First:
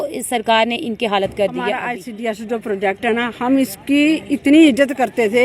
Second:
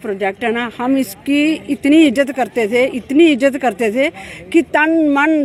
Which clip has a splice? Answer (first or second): first